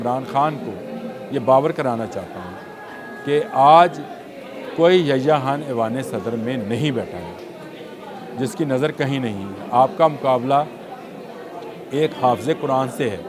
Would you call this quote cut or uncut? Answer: uncut